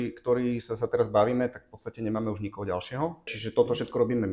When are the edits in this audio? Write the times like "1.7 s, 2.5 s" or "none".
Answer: 3.4 s